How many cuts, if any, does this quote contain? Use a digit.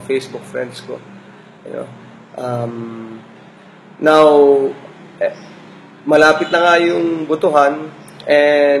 1